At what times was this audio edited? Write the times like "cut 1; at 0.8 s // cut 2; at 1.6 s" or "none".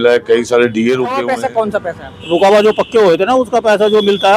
cut 1; at 1.3 s